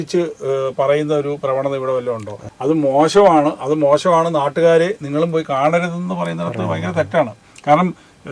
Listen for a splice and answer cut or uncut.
cut